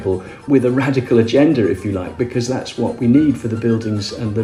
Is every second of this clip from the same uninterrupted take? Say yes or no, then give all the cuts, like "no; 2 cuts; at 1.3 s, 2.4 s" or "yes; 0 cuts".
yes; 0 cuts